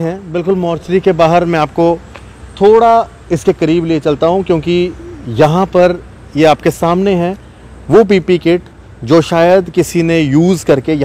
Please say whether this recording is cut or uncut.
uncut